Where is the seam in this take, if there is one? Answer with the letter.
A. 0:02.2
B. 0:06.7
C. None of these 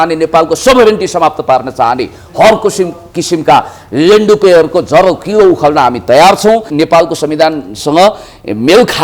B